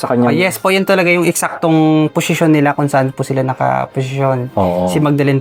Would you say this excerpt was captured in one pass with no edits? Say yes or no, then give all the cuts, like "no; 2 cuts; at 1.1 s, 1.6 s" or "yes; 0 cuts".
yes; 0 cuts